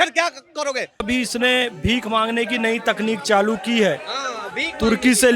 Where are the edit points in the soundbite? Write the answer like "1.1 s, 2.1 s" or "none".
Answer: 1.0 s